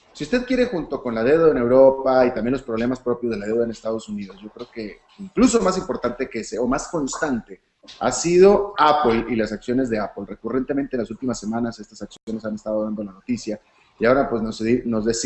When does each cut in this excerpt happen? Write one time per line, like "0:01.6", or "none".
0:04.1